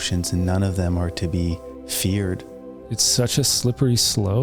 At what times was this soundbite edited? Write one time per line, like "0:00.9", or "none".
0:02.8